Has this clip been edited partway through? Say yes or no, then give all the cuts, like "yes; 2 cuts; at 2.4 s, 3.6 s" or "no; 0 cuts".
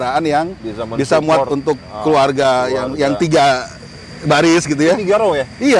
no; 0 cuts